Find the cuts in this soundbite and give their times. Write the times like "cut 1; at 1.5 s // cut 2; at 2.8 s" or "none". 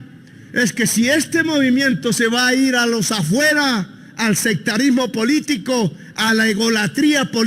none